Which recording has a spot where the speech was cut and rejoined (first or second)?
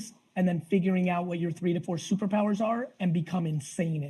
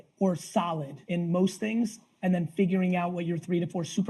second